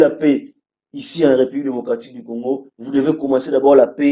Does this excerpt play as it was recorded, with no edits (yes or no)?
yes